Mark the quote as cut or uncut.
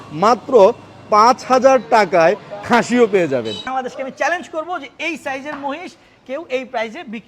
cut